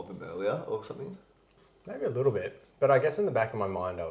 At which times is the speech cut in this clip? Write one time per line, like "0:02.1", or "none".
none